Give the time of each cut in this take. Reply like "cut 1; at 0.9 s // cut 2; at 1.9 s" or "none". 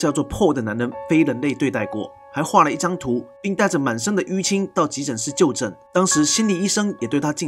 none